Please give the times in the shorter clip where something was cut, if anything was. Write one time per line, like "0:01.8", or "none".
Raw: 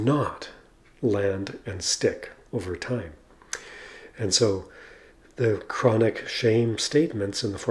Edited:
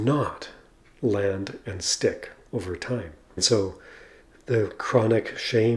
0:03.4